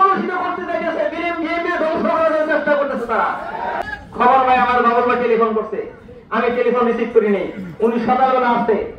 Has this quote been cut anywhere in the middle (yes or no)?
yes